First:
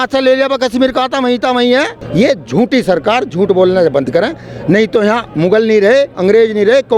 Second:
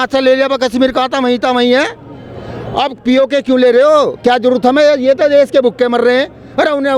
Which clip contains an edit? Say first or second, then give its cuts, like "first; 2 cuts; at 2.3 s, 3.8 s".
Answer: first; 1 cut; at 2.0 s